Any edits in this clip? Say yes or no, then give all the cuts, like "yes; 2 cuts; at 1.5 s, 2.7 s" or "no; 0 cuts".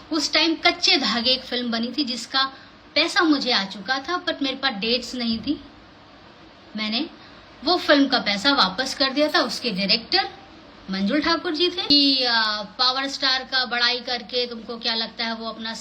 yes; 1 cut; at 11.9 s